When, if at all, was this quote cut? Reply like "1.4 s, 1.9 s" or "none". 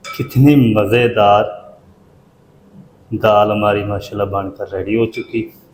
none